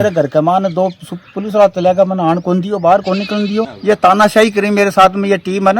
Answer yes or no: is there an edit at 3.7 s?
yes